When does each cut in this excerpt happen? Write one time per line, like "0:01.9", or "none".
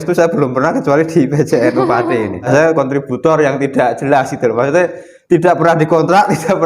0:02.5